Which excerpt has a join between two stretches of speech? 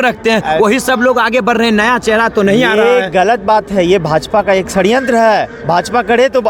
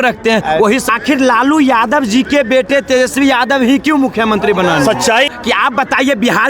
second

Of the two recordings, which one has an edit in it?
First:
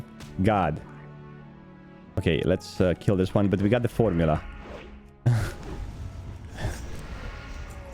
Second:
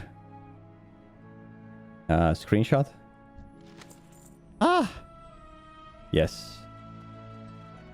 first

